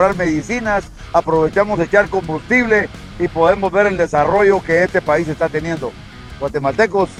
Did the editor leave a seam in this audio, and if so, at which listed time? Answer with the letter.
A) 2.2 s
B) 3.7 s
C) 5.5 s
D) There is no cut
D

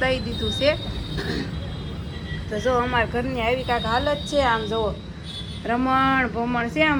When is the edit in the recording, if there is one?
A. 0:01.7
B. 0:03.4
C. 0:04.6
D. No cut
D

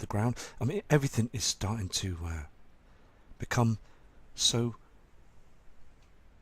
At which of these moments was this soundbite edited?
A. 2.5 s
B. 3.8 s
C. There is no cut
B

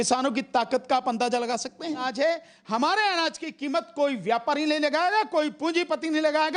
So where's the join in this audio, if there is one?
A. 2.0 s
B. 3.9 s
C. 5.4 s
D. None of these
A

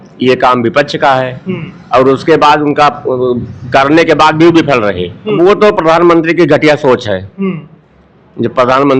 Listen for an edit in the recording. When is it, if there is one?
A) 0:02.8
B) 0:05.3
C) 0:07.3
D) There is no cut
B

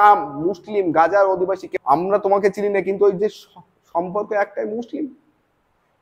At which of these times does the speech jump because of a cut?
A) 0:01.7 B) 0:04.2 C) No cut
A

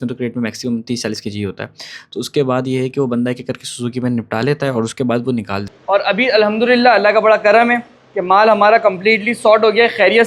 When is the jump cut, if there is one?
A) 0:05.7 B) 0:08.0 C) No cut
A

